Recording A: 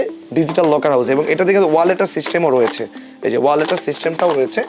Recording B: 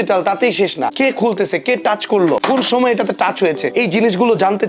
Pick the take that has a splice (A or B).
B